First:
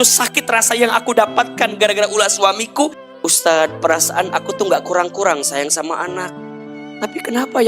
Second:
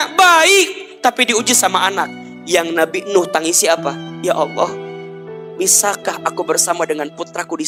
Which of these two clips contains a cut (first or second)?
first